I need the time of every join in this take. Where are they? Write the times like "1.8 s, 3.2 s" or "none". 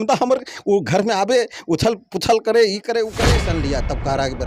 3.4 s